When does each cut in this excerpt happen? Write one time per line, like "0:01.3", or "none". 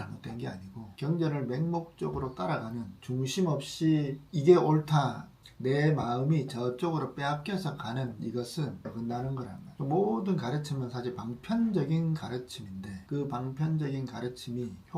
none